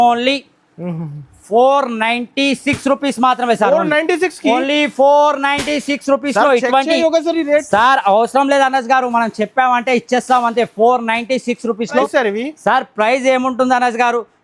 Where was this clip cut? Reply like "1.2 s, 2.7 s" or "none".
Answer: 12.1 s